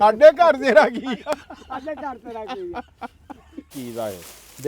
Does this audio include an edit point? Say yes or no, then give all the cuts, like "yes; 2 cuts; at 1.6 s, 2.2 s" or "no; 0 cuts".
yes; 1 cut; at 3.7 s